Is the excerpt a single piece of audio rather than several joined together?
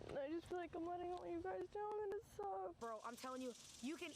no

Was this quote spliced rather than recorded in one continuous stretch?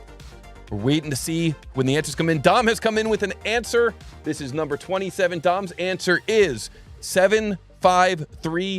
no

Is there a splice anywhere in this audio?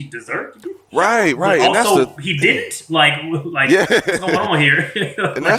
no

